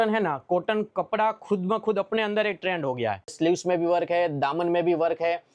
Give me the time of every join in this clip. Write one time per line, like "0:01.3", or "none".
0:03.3